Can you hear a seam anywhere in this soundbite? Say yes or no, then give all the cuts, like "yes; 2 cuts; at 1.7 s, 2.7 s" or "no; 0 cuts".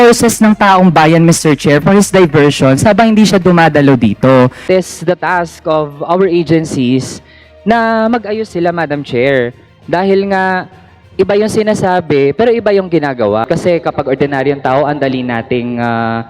yes; 2 cuts; at 4.6 s, 13.4 s